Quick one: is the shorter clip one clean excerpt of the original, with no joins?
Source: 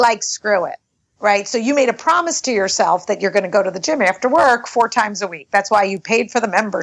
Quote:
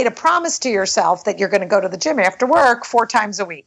yes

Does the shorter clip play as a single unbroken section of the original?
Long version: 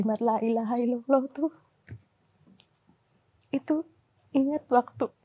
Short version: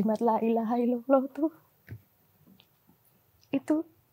yes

